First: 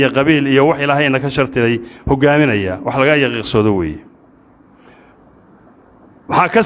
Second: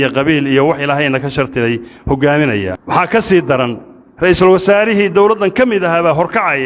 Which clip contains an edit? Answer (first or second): second